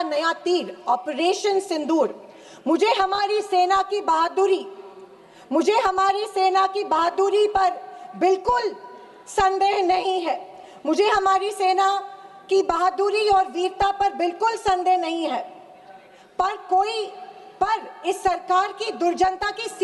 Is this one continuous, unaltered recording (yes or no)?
yes